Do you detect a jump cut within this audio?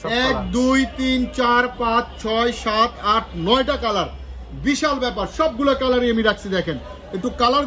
no; 0 cuts

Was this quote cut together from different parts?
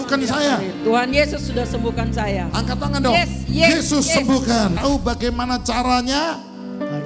yes; 1 cut; at 4.7 s

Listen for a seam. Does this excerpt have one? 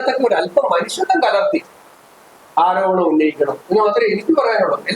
no; 0 cuts

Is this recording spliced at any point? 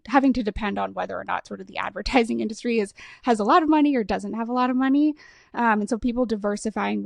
no; 0 cuts

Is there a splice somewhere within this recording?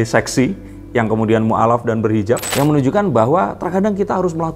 yes; 1 cut; at 2.5 s

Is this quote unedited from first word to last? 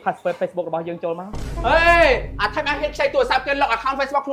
yes; 0 cuts

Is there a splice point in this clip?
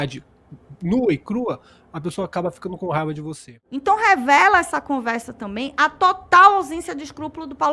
yes; 1 cut; at 3.7 s

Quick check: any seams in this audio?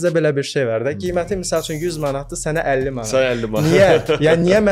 no; 0 cuts

